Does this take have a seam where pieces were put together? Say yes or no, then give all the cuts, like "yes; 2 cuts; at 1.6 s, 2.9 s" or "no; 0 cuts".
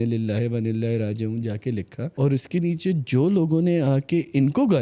yes; 1 cut; at 2.0 s